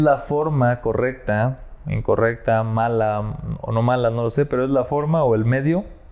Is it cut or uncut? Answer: uncut